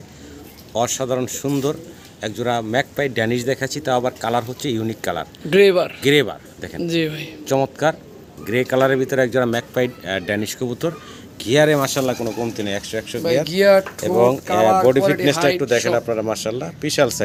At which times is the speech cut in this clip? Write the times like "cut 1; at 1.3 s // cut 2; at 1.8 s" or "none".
none